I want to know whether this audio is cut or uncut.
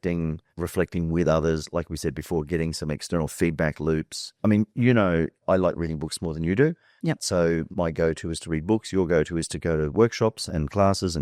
uncut